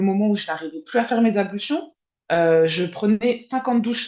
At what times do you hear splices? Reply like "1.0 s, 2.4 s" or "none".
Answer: none